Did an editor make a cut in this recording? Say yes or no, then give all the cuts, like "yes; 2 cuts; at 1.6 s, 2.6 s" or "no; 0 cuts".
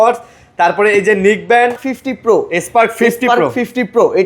yes; 1 cut; at 1.8 s